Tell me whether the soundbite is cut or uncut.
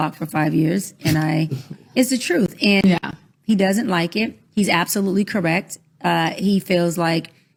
uncut